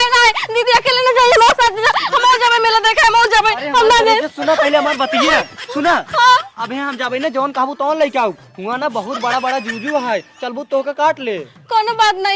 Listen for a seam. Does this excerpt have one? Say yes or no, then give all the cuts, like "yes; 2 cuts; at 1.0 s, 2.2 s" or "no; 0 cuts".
no; 0 cuts